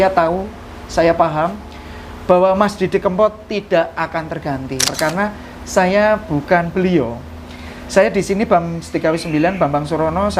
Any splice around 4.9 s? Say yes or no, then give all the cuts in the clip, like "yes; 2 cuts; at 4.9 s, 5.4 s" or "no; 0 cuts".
yes; 1 cut; at 4.9 s